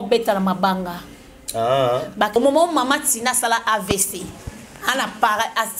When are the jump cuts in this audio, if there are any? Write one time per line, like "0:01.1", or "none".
0:02.3